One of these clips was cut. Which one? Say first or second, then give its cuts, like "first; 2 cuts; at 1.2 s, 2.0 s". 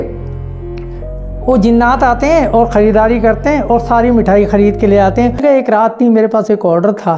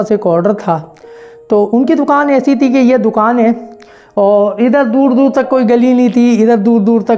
first; 1 cut; at 5.4 s